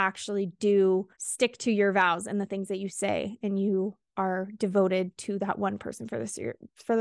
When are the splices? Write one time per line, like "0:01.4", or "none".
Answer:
0:01.2